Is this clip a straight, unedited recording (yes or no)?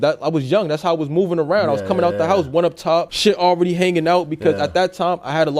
no